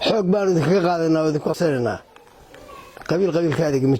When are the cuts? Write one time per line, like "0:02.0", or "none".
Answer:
0:01.5